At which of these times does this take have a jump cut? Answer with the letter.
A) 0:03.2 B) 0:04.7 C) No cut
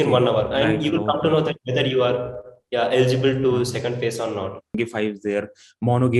B